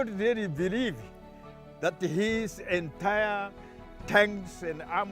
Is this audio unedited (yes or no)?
yes